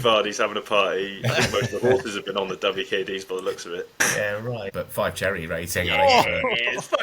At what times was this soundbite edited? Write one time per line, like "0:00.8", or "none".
0:04.7